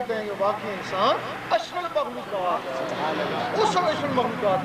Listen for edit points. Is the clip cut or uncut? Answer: uncut